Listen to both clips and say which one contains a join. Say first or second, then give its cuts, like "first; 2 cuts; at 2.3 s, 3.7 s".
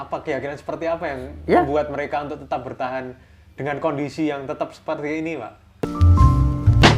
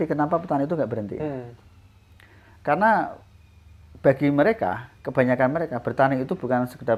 first; 1 cut; at 5.8 s